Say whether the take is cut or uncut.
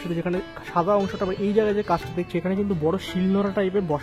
uncut